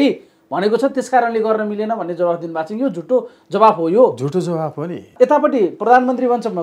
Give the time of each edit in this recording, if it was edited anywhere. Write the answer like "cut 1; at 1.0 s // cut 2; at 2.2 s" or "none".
cut 1; at 5.1 s

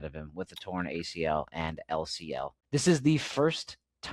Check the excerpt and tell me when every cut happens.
cut 1; at 2.6 s

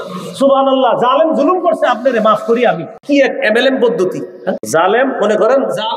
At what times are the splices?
cut 1; at 2.9 s // cut 2; at 4.6 s

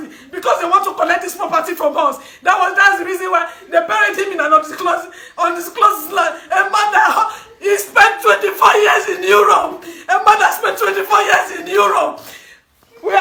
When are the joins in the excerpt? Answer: none

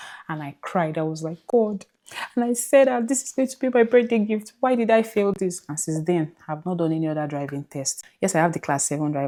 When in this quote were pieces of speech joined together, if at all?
none

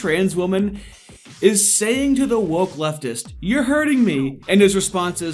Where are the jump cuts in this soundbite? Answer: none

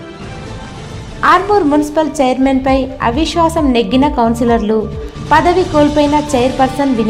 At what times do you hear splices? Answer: cut 1; at 1.1 s

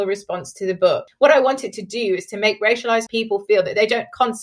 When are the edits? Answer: cut 1; at 1.0 s // cut 2; at 3.1 s

